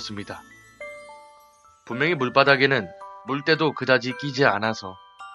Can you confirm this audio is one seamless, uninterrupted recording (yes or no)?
no